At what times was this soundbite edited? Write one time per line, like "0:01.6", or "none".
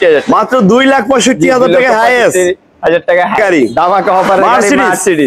0:03.4